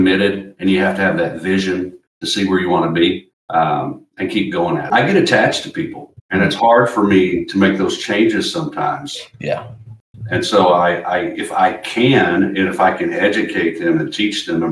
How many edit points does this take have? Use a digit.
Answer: 1